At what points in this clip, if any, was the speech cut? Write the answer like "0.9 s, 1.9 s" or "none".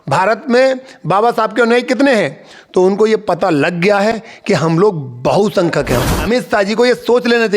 6.1 s